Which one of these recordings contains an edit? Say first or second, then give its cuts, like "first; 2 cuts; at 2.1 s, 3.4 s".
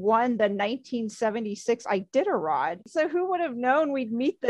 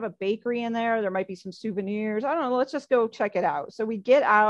first; 1 cut; at 2.9 s